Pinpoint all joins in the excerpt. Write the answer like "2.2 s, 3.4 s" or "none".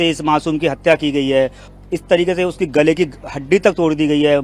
1.7 s